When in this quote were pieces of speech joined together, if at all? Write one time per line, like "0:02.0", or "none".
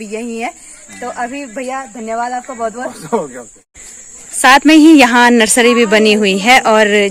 none